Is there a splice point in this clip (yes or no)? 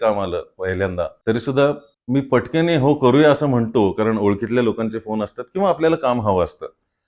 yes